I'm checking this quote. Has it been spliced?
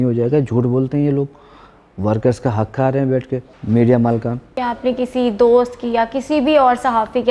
yes; 2 cuts; at 3.5 s, 4.5 s

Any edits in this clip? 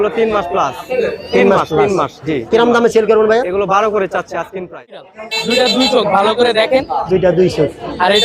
yes; 1 cut; at 5.0 s

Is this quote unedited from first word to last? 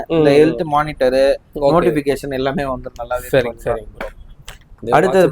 yes; 0 cuts

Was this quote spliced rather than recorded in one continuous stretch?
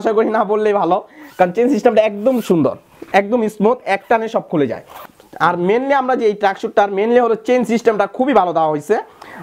no; 0 cuts

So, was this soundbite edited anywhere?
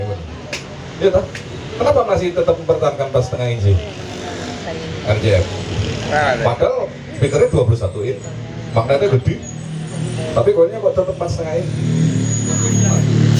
no; 0 cuts

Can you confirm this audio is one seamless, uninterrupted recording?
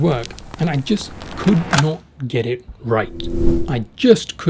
yes; 0 cuts

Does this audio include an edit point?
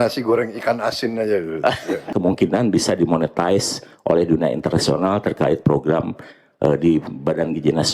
yes; 1 cut; at 2.1 s

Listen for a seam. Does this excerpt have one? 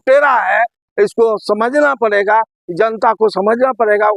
no; 0 cuts

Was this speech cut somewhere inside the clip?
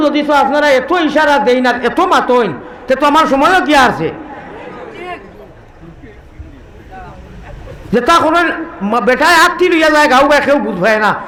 no; 0 cuts

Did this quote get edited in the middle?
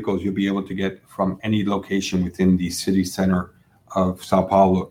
no; 0 cuts

